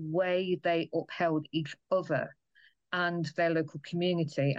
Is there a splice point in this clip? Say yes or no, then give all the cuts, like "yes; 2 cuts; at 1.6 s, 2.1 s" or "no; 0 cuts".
no; 0 cuts